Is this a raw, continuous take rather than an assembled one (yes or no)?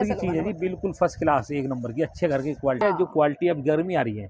no